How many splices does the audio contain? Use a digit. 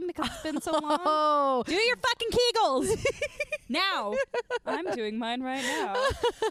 0